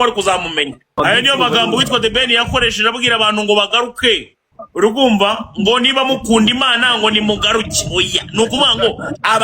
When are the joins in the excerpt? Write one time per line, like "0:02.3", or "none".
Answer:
0:01.0